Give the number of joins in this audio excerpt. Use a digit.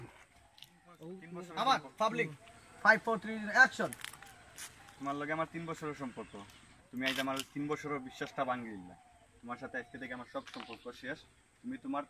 1